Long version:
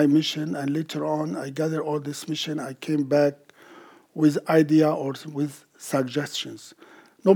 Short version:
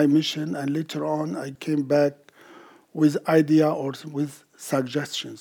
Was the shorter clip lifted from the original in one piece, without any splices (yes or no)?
no